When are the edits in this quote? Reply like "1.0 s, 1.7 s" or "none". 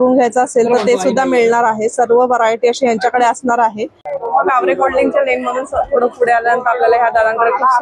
4.1 s